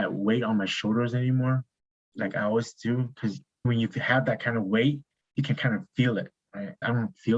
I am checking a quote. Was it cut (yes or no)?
no